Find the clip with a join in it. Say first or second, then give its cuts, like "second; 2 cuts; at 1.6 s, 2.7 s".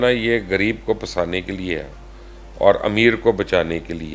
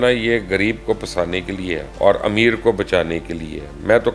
second; 1 cut; at 1.9 s